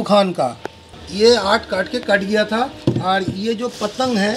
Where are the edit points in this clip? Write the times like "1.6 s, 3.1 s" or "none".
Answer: 1.0 s